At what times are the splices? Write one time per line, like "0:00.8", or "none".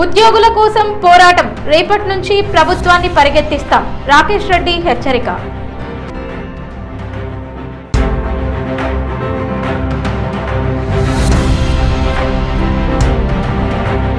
0:07.8